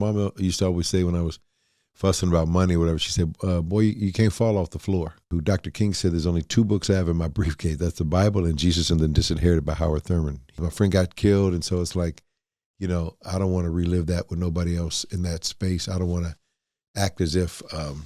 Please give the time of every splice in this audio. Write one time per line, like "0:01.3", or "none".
0:05.3
0:10.6